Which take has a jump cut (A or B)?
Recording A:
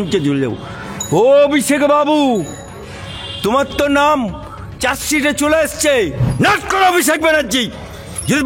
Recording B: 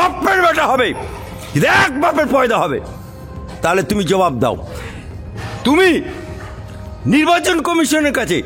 A